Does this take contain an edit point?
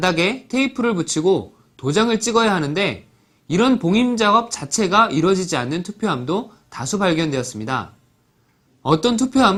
no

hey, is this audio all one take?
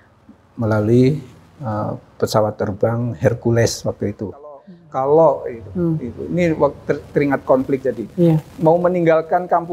no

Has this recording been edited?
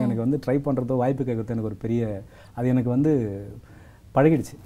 no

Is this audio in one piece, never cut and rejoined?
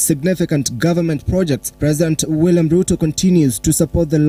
yes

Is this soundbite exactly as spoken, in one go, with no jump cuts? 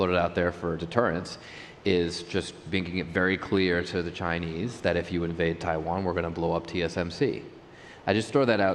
yes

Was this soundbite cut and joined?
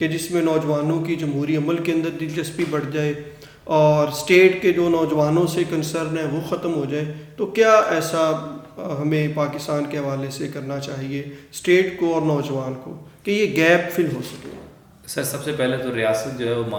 no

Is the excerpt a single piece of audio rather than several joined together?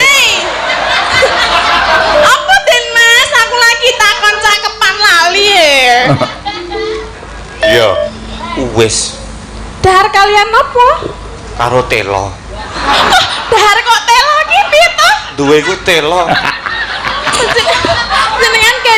no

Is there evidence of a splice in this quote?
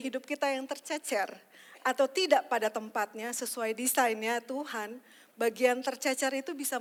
no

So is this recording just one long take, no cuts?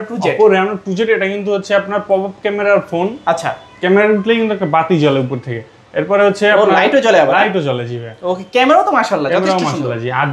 yes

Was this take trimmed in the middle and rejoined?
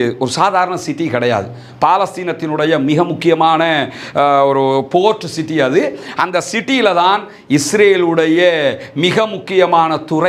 no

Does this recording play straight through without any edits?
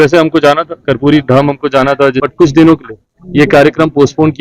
no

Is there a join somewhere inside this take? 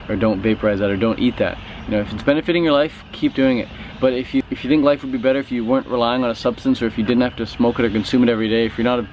yes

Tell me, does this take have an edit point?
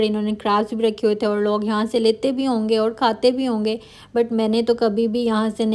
no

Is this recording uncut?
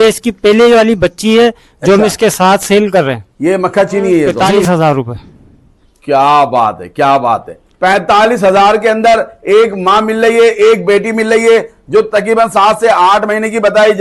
no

